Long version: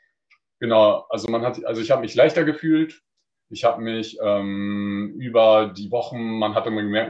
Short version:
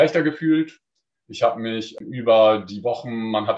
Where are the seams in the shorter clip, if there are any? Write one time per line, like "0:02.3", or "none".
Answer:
0:02.0